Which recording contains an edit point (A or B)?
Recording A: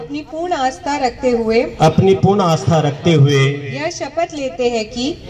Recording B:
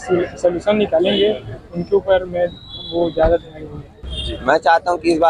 B